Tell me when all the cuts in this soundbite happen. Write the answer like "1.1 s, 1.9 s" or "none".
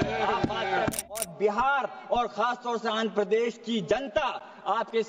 1.0 s